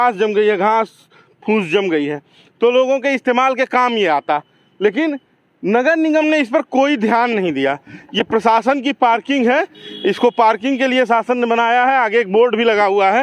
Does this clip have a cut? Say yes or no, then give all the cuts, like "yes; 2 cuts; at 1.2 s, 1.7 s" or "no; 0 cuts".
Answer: no; 0 cuts